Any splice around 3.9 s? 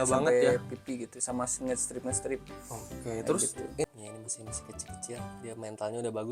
yes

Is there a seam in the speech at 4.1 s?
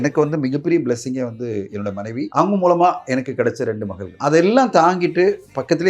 yes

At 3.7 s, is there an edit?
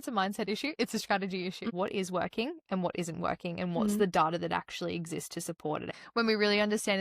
no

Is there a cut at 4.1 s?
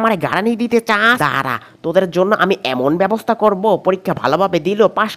no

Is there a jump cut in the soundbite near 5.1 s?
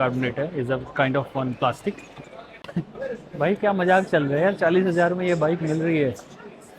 no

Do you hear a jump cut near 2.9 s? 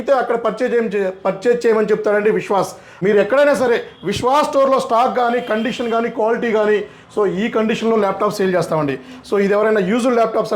yes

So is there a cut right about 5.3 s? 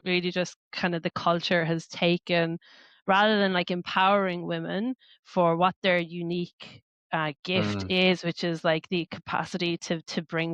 no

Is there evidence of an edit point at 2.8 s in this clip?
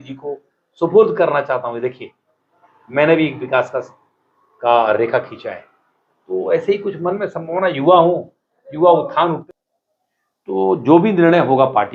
no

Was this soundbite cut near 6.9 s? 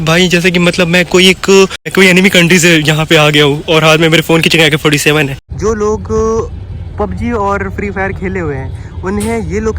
no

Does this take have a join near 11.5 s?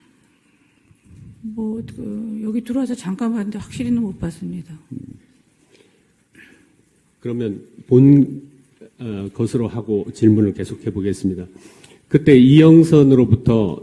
no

